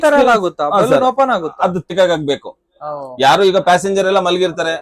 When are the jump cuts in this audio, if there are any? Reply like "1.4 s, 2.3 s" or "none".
1.9 s